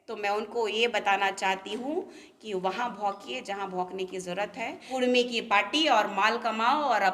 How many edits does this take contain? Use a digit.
1